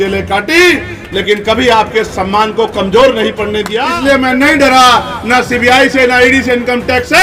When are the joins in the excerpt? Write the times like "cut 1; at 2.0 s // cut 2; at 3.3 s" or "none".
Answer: cut 1; at 3.8 s